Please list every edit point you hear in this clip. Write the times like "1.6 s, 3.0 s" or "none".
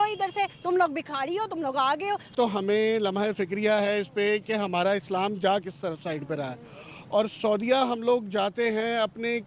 2.3 s